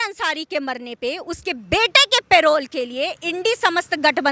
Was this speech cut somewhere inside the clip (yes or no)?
no